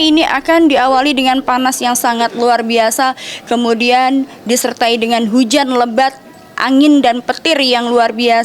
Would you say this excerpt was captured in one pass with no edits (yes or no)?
yes